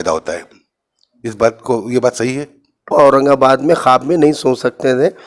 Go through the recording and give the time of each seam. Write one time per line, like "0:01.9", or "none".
0:02.9